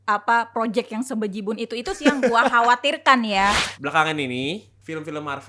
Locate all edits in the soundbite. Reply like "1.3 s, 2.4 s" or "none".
3.7 s